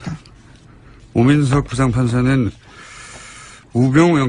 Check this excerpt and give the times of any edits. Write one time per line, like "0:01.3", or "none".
none